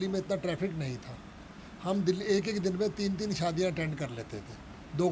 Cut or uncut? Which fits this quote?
uncut